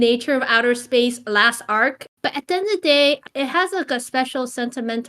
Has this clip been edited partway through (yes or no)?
yes